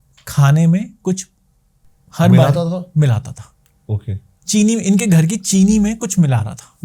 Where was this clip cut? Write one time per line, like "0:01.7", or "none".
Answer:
none